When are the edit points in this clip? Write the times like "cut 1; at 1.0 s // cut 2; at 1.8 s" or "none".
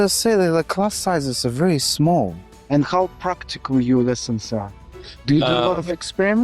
cut 1; at 2.4 s